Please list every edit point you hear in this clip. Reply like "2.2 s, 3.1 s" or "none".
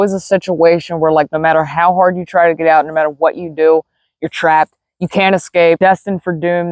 5.8 s